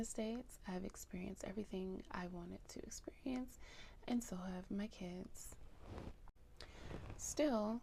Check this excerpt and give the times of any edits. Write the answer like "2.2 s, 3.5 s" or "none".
none